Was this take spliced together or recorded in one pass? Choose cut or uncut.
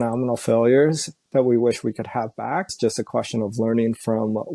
cut